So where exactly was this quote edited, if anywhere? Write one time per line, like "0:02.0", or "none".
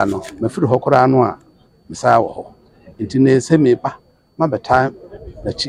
none